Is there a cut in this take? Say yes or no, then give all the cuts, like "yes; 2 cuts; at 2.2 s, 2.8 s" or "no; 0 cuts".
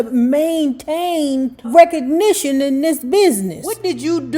yes; 1 cut; at 1.7 s